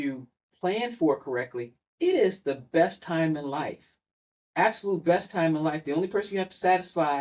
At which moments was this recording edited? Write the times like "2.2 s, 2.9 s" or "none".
none